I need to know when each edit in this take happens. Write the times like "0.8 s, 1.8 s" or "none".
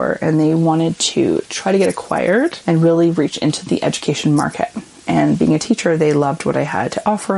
2.6 s